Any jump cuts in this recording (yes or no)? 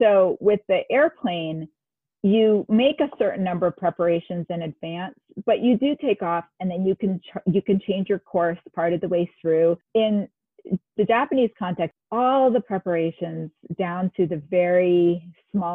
yes